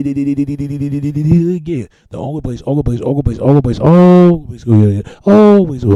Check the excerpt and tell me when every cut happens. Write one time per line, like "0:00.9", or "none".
none